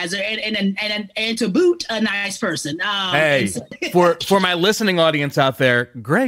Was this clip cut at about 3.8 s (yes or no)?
yes